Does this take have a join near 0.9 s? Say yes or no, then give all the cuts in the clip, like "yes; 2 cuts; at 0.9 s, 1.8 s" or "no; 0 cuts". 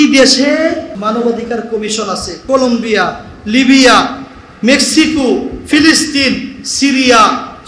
yes; 2 cuts; at 0.9 s, 2.3 s